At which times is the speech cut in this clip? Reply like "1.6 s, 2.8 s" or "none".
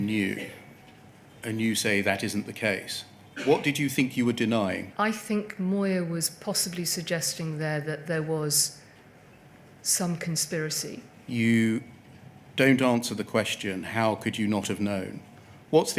4.9 s, 11.1 s

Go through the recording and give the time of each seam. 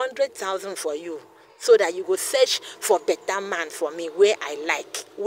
none

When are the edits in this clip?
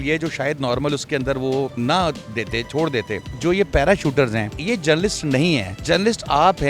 1.7 s, 3.3 s, 4.6 s, 5.7 s

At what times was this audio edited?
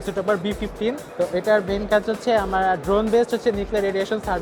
none

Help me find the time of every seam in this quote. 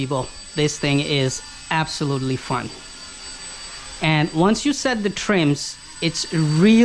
none

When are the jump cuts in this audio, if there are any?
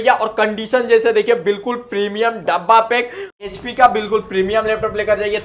3.4 s

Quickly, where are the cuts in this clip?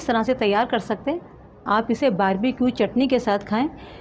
1.5 s

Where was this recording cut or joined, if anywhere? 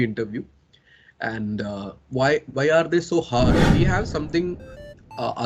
3.7 s

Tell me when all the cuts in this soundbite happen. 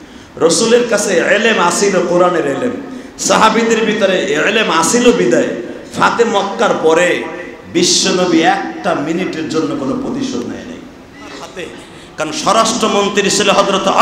11.6 s

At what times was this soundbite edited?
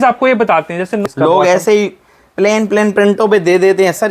1.0 s

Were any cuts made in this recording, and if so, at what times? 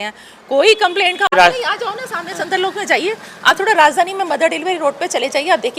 1.3 s

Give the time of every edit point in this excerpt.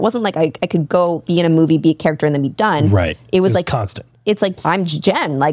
4.6 s

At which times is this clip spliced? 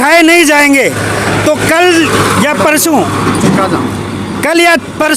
none

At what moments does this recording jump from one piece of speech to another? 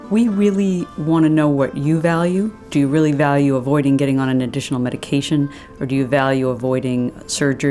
0.9 s

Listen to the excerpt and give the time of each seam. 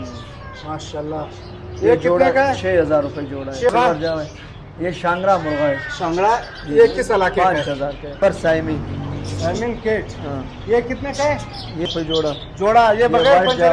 3.7 s, 8.2 s, 11.9 s

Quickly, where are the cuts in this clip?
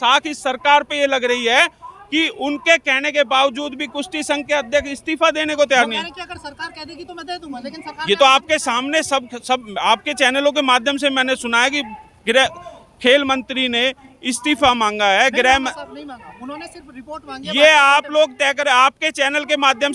none

